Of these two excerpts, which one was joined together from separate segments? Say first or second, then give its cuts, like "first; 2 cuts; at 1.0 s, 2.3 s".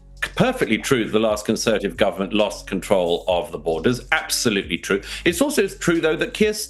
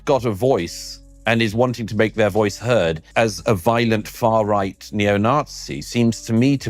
second; 1 cut; at 3.0 s